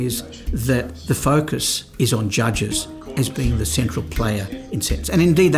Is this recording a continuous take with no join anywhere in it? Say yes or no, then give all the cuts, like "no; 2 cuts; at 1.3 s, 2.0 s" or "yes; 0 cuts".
no; 1 cut; at 1.8 s